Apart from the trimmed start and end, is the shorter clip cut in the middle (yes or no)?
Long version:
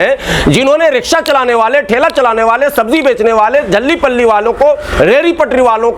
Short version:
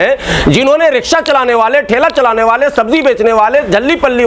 no